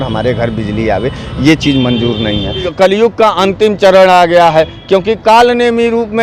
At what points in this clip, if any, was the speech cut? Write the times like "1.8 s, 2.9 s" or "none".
2.7 s